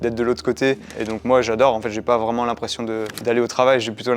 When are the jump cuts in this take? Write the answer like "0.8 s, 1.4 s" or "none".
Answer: 0.9 s, 3.1 s